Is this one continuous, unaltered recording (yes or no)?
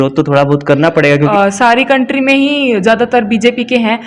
no